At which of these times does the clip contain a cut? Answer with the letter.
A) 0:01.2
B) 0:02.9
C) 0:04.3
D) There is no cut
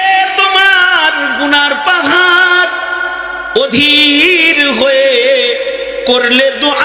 D